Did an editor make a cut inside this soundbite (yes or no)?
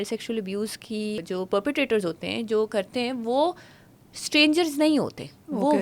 yes